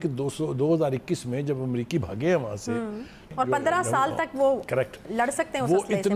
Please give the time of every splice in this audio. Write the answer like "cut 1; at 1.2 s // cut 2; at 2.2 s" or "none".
cut 1; at 3.3 s